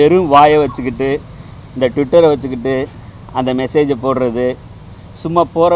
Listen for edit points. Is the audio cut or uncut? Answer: uncut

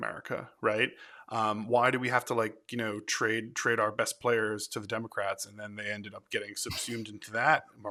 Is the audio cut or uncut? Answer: uncut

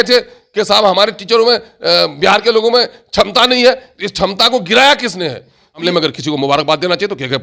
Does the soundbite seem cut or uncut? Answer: cut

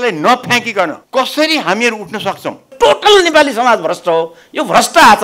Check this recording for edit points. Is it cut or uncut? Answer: cut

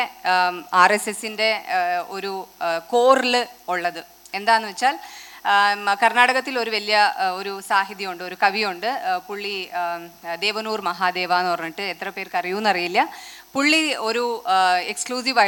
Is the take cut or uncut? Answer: uncut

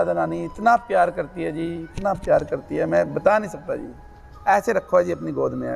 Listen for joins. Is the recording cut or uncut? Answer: uncut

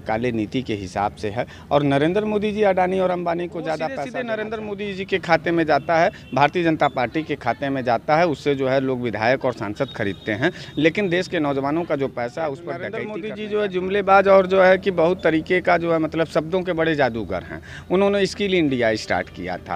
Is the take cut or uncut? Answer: cut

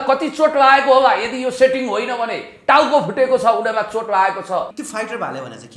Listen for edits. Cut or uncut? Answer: cut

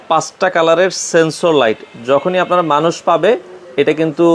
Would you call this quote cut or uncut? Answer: uncut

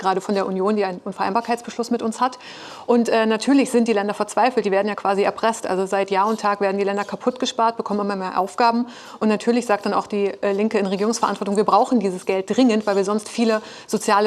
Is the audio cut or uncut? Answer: uncut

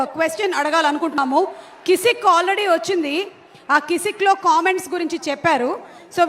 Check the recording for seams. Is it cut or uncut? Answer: cut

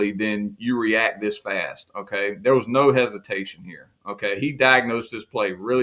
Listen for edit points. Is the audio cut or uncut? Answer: uncut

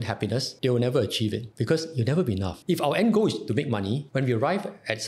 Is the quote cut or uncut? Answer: uncut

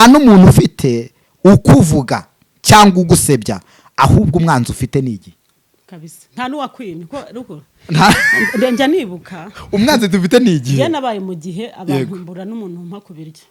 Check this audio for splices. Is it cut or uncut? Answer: uncut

